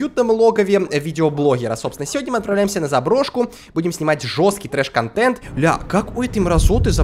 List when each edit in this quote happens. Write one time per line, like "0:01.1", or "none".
0:05.5